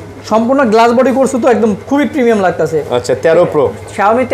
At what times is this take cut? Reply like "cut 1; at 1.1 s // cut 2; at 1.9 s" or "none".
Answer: none